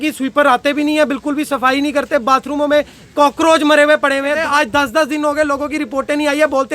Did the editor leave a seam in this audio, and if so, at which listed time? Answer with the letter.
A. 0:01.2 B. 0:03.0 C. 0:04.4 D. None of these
C